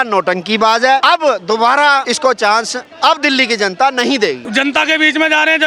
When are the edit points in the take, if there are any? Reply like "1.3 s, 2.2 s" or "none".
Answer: 1.0 s, 2.1 s, 4.4 s